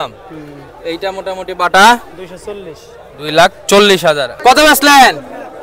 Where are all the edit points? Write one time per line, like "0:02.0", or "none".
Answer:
0:04.3